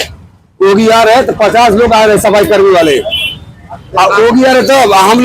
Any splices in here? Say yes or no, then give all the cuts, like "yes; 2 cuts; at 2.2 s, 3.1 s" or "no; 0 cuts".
no; 0 cuts